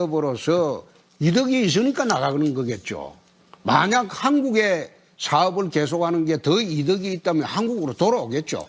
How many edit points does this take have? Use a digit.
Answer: 1